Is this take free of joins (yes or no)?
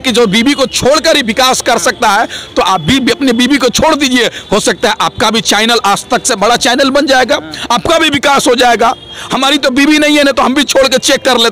yes